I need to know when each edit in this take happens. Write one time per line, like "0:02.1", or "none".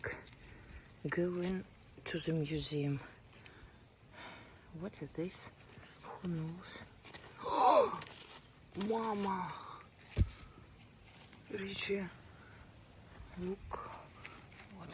none